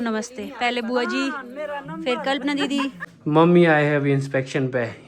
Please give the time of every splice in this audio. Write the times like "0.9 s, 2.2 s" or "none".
3.1 s